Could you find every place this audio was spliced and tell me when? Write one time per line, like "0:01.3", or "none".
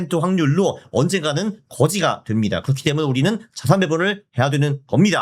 none

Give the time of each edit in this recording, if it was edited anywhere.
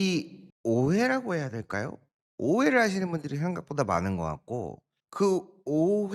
none

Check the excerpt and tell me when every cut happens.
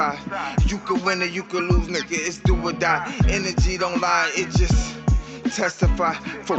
0:02.3

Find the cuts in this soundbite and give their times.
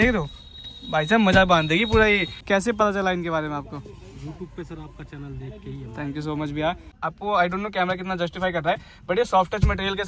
0:02.3
0:06.9

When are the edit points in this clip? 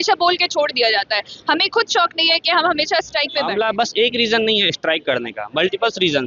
0:03.5

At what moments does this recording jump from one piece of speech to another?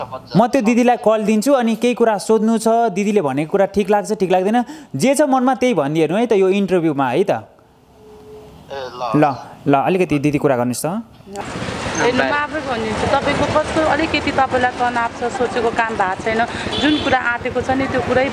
0:11.2

